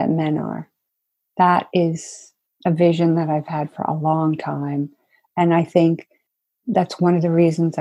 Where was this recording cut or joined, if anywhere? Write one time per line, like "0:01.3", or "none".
none